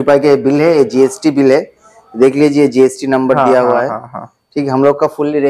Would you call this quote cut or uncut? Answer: uncut